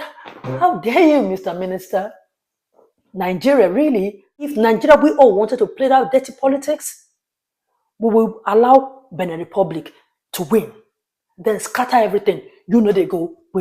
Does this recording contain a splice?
yes; 1 cut; at 4.5 s

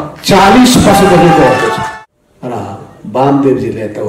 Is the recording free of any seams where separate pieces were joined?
no; 1 cut; at 1.8 s

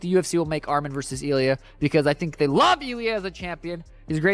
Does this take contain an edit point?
no; 0 cuts

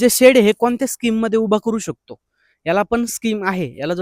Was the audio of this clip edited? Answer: no; 0 cuts

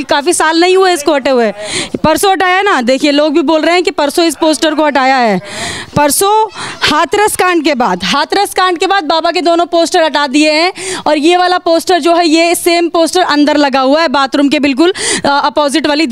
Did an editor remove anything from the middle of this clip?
no; 0 cuts

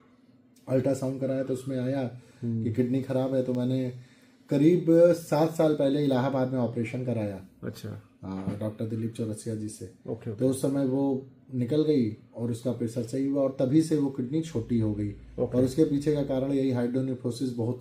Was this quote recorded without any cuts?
yes; 0 cuts

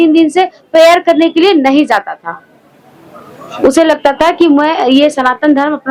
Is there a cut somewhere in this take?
no; 0 cuts

